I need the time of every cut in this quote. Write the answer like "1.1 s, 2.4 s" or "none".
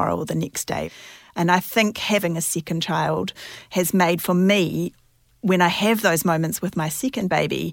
0.9 s, 2.2 s

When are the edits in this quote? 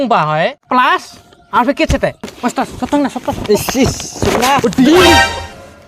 2.3 s

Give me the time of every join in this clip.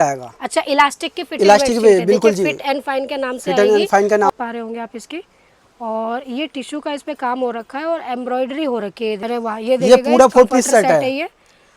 4.3 s, 9.2 s

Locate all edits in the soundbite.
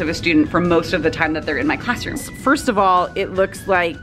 2.2 s

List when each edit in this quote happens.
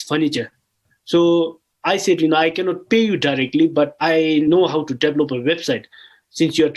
4.0 s

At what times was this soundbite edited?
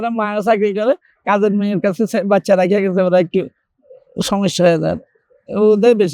none

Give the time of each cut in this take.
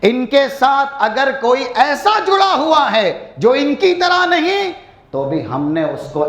none

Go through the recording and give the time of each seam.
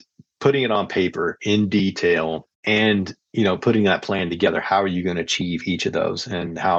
none

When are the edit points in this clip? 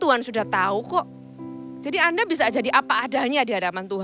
none

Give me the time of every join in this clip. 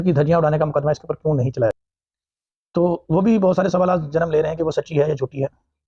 1.7 s

